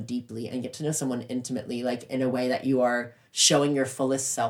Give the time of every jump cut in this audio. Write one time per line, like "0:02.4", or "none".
none